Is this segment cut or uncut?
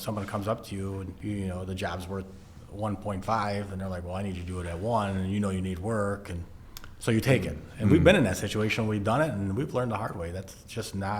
cut